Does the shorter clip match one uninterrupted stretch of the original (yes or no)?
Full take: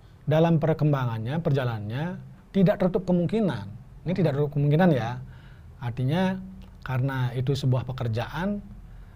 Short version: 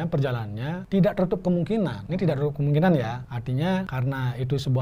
no